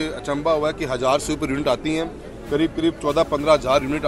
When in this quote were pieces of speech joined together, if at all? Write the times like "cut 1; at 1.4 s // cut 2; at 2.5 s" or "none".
none

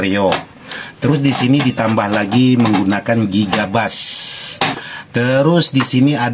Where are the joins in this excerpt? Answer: cut 1; at 4.8 s

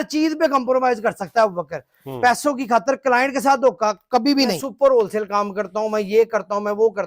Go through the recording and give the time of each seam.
cut 1; at 4.6 s

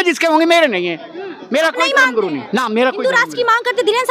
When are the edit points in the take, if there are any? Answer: none

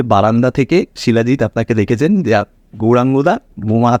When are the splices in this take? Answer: none

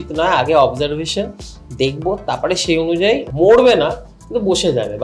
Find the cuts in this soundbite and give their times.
cut 1; at 3.3 s

